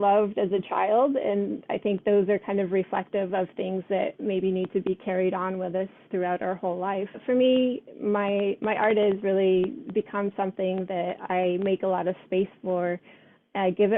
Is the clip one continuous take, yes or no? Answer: no